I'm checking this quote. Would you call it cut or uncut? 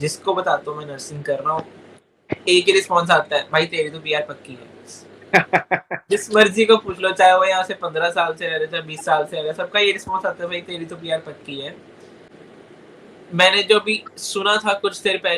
uncut